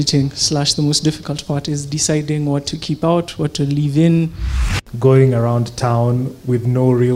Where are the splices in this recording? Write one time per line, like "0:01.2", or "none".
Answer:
0:04.8